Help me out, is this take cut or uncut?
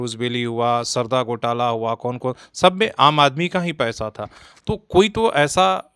uncut